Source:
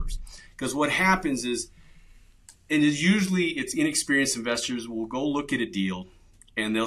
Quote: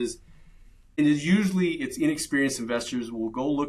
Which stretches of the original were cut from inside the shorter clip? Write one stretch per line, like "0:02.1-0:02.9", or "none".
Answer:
0:02.5-0:02.8